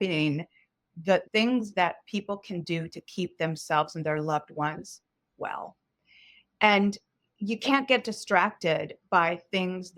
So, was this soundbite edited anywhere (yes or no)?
yes